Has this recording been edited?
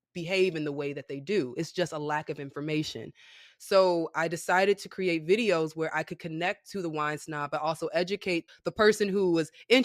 yes; 1 cut; at 8.4 s

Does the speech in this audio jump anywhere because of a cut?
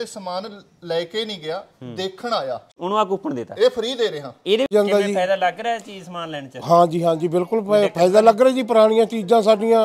yes; 2 cuts; at 2.7 s, 4.7 s

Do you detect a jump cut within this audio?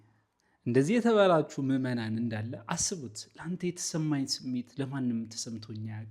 no; 0 cuts

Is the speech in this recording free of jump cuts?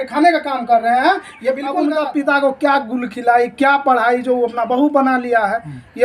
no; 1 cut; at 1.7 s

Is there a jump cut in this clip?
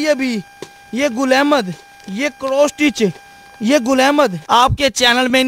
yes; 1 cut; at 4.5 s

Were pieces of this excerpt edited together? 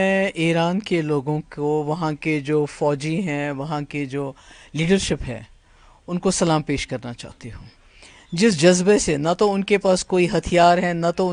no; 0 cuts

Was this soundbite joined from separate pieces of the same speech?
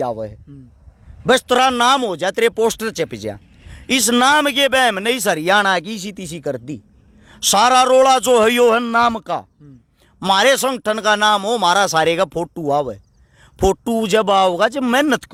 no; 0 cuts

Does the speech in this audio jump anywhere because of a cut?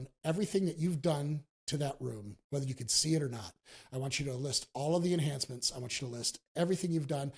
no; 0 cuts

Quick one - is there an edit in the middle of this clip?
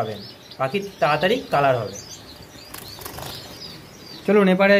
no; 0 cuts

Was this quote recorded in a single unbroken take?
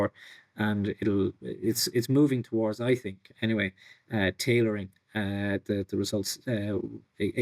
yes; 0 cuts

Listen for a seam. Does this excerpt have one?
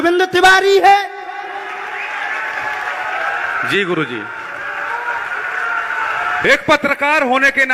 no; 0 cuts

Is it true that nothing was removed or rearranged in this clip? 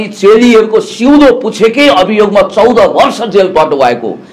yes; 0 cuts

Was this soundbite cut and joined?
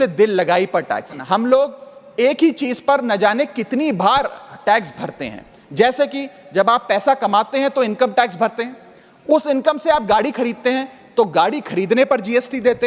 yes; 1 cut; at 1.1 s

